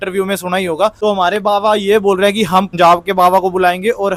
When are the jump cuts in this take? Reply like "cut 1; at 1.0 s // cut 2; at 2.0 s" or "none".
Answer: none